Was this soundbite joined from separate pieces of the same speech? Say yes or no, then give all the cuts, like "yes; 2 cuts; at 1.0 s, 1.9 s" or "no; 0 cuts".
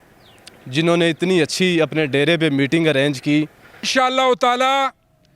yes; 1 cut; at 3.9 s